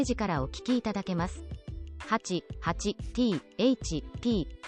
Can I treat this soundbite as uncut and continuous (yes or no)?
yes